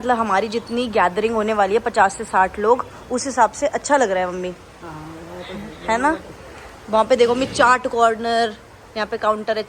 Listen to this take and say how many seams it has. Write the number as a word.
zero